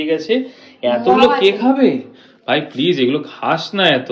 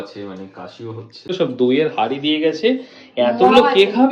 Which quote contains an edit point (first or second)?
second